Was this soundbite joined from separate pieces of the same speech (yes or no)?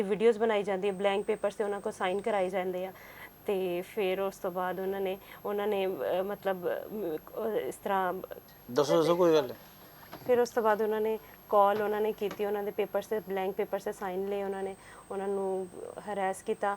no